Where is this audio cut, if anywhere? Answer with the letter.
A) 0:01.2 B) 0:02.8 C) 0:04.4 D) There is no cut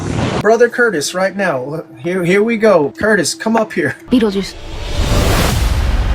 D